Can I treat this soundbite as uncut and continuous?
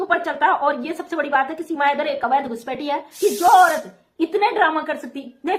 no; 1 cut; at 3.1 s

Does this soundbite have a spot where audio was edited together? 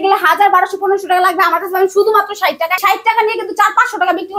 yes; 1 cut; at 2.8 s

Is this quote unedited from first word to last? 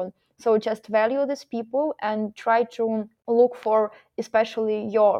no; 1 cut; at 3.1 s

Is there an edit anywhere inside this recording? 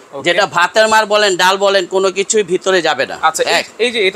no; 0 cuts

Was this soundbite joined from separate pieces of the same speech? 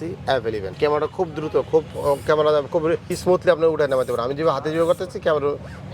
yes; 2 cuts; at 0.8 s, 3.1 s

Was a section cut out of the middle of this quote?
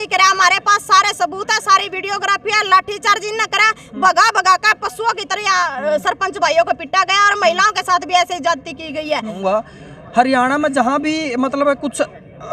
yes; 1 cut; at 9.4 s

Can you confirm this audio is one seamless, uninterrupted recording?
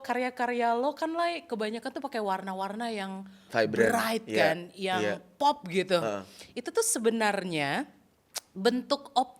yes; 0 cuts

